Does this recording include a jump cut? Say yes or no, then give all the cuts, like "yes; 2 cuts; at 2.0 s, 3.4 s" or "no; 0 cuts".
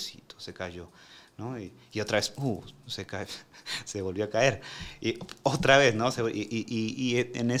no; 0 cuts